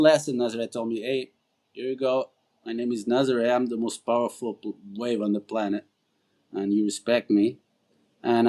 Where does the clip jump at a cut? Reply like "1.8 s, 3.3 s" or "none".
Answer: none